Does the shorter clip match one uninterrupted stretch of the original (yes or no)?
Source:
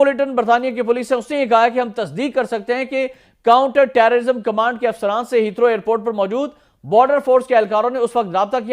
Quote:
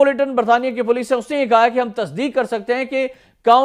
yes